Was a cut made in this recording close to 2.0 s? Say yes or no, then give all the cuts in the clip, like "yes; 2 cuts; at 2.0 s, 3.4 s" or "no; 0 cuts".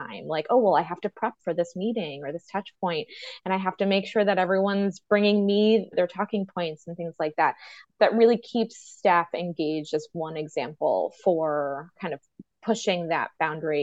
no; 2 cuts; at 5.9 s, 11.9 s